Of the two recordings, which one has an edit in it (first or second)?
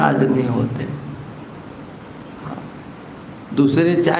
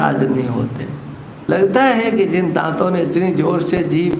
second